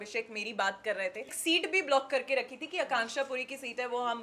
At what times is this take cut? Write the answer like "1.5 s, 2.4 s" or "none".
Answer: 1.3 s